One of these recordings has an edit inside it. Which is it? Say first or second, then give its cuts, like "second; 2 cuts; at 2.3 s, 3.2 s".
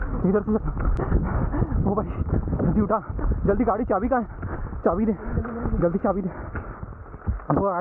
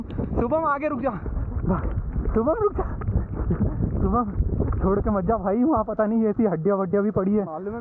first; 1 cut; at 0.9 s